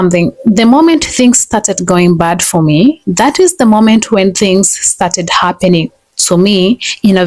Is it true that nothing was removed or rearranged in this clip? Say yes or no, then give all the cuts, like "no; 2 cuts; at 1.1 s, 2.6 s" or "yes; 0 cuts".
yes; 0 cuts